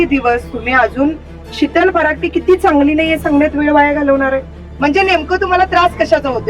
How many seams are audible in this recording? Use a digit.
1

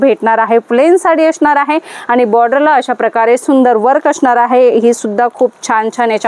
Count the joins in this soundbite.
0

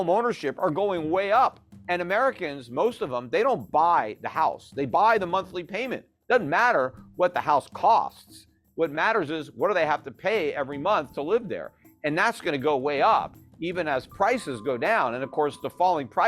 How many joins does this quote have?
1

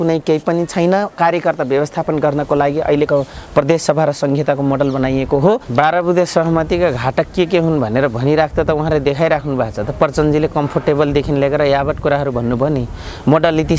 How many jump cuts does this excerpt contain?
1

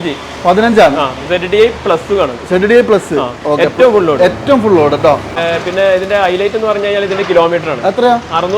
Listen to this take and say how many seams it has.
1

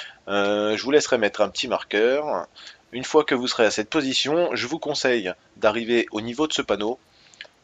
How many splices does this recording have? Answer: 1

